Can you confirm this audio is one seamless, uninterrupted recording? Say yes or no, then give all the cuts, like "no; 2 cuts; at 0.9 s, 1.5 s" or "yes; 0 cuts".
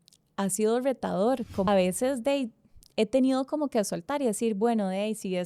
no; 1 cut; at 1.7 s